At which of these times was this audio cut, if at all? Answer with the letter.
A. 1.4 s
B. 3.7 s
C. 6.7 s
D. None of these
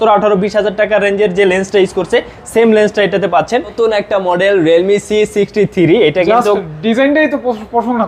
B